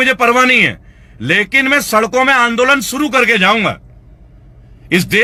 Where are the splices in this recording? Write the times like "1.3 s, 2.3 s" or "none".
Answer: none